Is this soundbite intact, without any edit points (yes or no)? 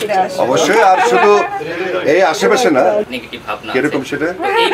no